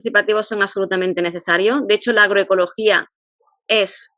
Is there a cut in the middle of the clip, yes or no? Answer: no